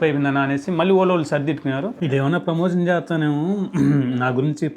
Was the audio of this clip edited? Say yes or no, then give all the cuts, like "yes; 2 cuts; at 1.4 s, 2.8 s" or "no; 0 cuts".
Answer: yes; 1 cut; at 1.9 s